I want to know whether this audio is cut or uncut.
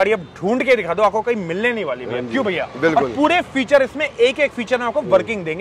uncut